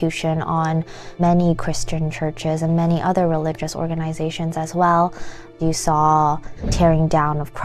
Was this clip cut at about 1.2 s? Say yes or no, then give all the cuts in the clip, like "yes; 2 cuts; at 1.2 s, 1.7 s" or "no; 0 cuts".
yes; 3 cuts; at 1.2 s, 5.5 s, 6.7 s